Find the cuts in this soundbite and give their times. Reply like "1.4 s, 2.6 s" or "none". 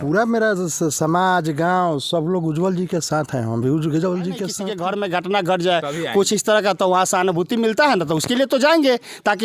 4.6 s